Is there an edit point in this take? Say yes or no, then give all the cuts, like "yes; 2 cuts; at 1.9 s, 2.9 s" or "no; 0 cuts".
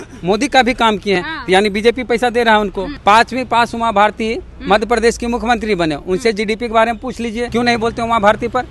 yes; 2 cuts; at 2.9 s, 7.5 s